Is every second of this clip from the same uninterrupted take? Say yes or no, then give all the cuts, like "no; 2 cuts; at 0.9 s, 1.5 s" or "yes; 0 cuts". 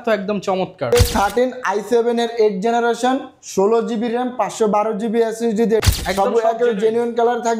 no; 2 cuts; at 0.9 s, 5.8 s